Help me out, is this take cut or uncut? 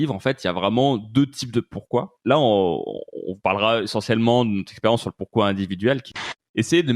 cut